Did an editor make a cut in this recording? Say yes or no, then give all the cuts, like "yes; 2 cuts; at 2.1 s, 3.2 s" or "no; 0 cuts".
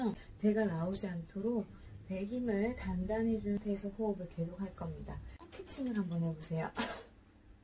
no; 0 cuts